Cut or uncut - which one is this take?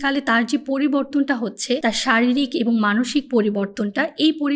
cut